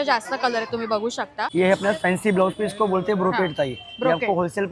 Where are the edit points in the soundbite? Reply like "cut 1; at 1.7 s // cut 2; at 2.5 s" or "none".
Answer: cut 1; at 1.5 s